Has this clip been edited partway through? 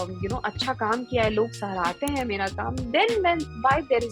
no; 0 cuts

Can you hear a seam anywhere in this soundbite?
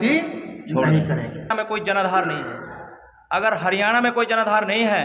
yes; 1 cut; at 1.5 s

